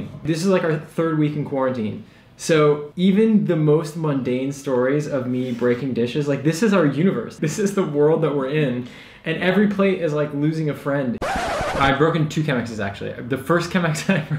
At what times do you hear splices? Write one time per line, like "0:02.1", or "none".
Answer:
0:07.3
0:11.7